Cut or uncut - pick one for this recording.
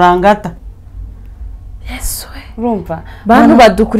uncut